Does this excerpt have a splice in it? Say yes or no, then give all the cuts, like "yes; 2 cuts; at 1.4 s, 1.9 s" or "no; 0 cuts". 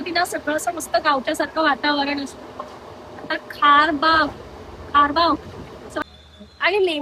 yes; 1 cut; at 6.0 s